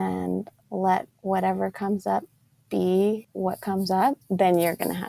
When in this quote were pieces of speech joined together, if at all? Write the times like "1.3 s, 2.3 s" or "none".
1.1 s, 3.3 s, 4.2 s